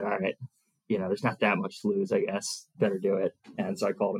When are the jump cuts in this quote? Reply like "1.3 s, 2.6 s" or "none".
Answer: 2.7 s